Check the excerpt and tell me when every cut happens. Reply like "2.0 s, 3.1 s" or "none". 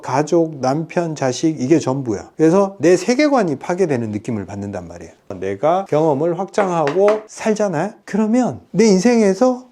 5.3 s, 7.3 s